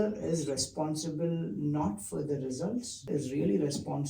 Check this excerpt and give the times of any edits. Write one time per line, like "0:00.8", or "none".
0:03.1